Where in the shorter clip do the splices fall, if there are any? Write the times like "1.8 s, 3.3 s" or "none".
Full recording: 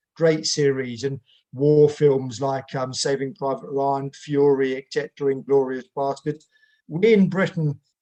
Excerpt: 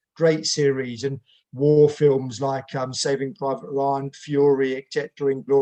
none